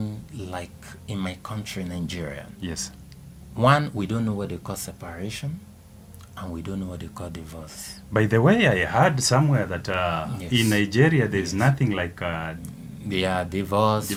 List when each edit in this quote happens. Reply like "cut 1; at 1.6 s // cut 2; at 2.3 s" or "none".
none